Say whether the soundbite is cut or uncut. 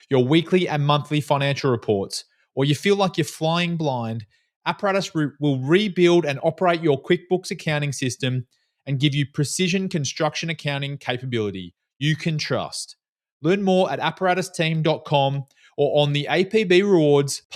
uncut